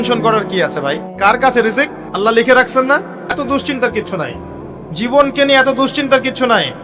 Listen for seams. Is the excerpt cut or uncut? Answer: cut